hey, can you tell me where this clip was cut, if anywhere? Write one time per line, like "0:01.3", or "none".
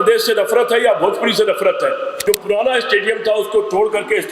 0:02.2